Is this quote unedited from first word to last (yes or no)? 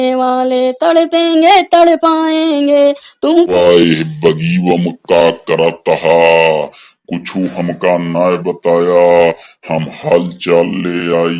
no